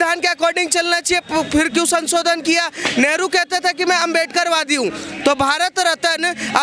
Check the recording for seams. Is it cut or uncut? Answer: uncut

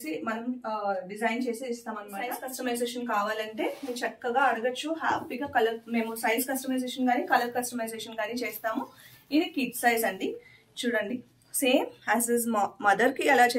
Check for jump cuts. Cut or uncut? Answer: cut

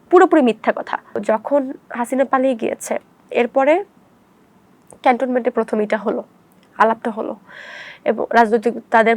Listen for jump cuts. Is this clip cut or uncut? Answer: cut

